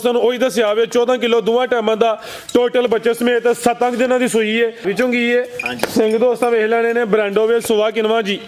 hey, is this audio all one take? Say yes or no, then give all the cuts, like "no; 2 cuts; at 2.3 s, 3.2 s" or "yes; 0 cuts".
no; 1 cut; at 4.8 s